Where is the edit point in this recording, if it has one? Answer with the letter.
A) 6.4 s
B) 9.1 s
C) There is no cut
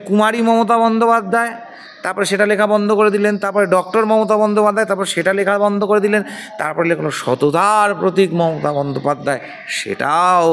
C